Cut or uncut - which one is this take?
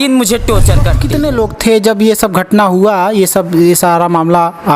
cut